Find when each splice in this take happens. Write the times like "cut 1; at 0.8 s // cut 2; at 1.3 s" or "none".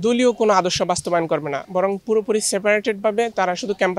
cut 1; at 1.6 s